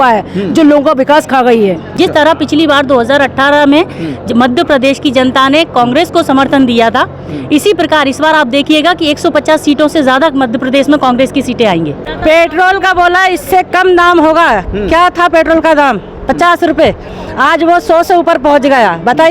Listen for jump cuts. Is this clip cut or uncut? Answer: cut